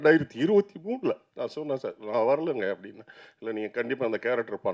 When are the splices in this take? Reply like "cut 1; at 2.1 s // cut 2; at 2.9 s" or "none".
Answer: cut 1; at 1.3 s